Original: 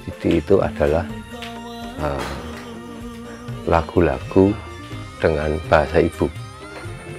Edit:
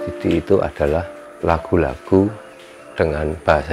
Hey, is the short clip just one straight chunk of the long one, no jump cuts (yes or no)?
no